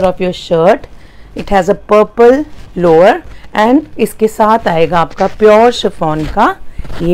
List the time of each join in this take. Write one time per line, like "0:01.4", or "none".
none